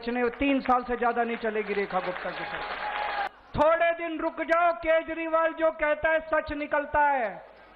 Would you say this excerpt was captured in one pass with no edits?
no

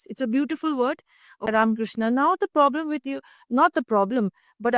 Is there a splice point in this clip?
yes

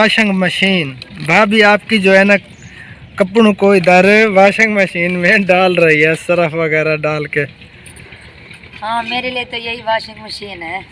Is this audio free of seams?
yes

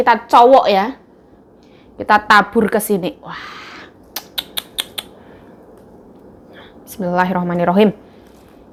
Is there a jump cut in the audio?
no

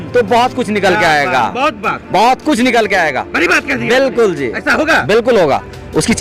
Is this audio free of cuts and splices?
yes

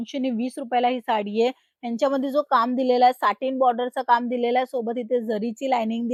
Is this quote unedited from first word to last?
yes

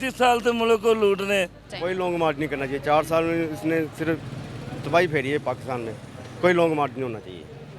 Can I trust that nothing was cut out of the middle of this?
no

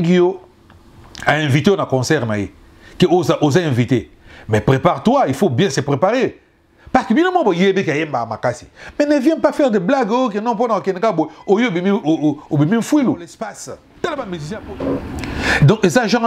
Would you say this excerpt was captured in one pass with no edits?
no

